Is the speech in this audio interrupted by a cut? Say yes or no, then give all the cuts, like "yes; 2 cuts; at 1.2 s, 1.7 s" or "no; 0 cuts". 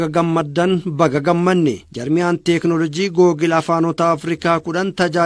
yes; 1 cut; at 1.9 s